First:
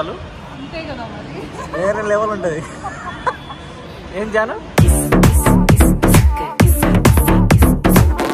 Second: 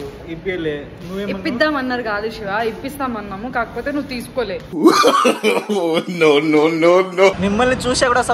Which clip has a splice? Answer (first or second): second